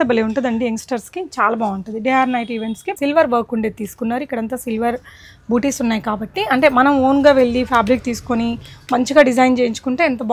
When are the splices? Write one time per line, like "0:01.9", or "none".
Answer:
0:02.9